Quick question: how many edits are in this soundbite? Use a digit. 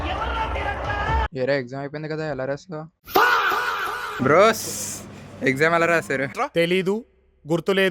2